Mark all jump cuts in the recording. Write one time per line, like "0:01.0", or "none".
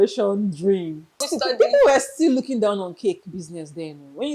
0:01.3